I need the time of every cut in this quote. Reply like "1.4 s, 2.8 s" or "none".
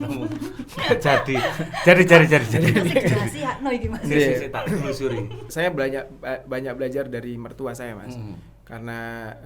5.5 s

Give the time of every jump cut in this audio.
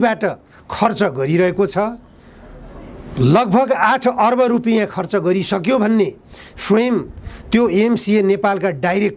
none

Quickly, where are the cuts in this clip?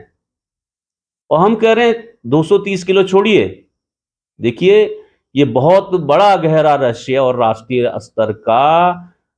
none

